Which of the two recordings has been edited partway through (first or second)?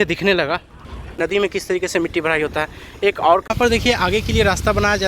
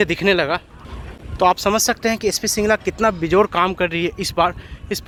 first